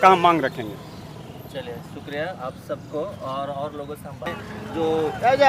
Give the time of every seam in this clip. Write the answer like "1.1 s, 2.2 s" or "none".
4.3 s